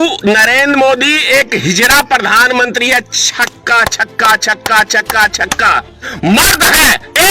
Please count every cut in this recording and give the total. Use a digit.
1